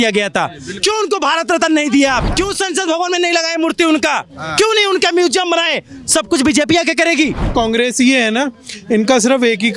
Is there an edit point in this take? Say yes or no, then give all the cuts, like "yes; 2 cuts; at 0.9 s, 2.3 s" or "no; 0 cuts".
yes; 2 cuts; at 2.3 s, 7.5 s